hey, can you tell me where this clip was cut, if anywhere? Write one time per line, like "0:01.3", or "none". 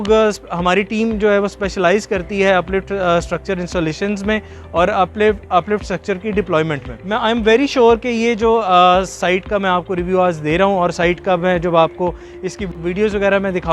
0:06.9